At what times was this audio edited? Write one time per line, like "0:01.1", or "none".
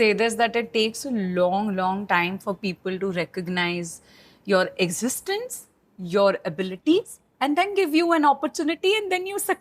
none